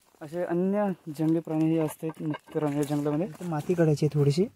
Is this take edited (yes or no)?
yes